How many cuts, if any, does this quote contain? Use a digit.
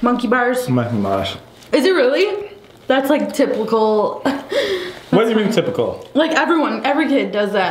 0